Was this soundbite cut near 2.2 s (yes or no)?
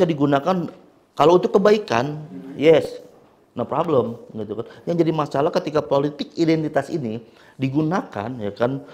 no